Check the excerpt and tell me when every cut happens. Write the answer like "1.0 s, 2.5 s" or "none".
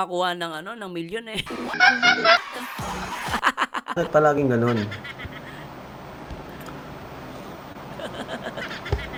none